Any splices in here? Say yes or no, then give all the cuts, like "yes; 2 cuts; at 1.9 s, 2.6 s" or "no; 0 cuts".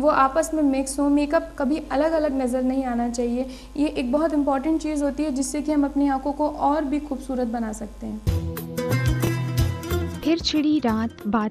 yes; 1 cut; at 8.2 s